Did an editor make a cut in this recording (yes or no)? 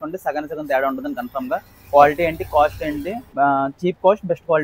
yes